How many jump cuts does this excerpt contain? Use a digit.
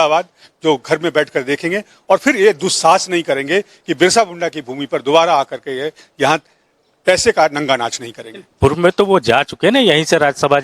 0